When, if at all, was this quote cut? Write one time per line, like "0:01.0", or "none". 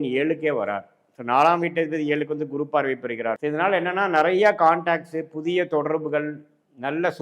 0:03.4